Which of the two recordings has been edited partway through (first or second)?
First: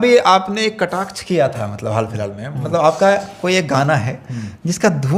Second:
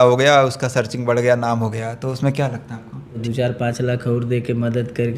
second